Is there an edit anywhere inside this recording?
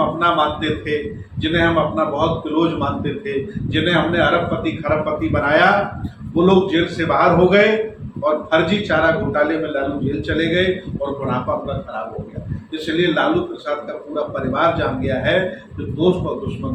no; 0 cuts

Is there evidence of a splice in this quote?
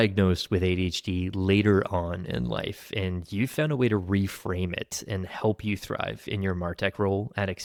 no; 0 cuts

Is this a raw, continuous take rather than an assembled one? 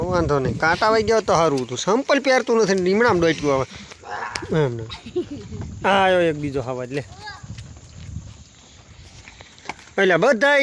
yes; 0 cuts

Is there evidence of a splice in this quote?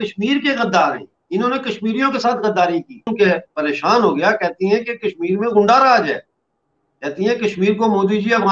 yes; 1 cut; at 3.1 s

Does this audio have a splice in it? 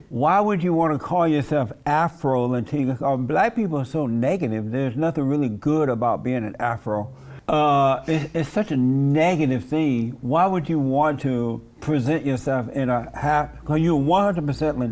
yes; 1 cut; at 7.3 s

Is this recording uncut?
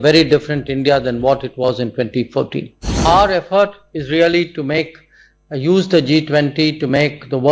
no; 1 cut; at 3.0 s

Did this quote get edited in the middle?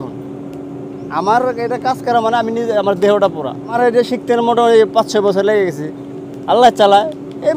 no; 0 cuts

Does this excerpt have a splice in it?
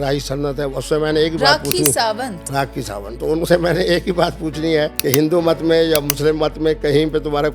yes; 1 cut; at 5.0 s

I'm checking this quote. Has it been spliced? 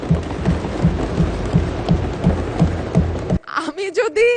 yes; 1 cut; at 3.4 s

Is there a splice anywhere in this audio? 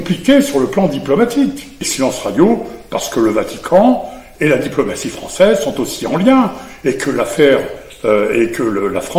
yes; 1 cut; at 1.8 s

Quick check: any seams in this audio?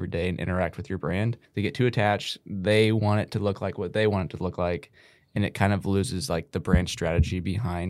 yes; 1 cut; at 1.4 s

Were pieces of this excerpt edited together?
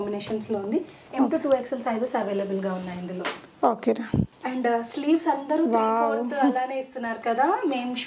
no; 0 cuts

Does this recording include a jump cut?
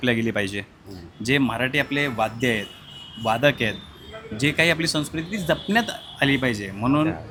no; 0 cuts

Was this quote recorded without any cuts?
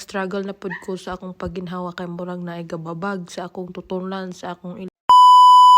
no; 1 cut; at 4.9 s

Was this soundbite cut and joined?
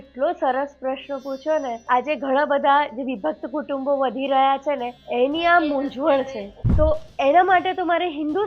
yes; 3 cuts; at 1.8 s, 4.9 s, 6.4 s

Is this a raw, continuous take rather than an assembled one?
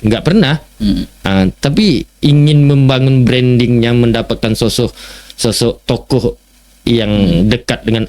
yes; 0 cuts

